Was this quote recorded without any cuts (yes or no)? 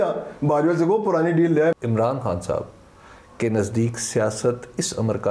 no